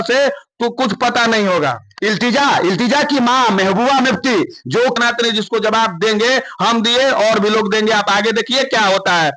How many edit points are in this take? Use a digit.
1